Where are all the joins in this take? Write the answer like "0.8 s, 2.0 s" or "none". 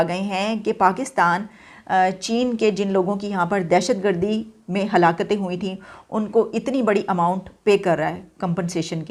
none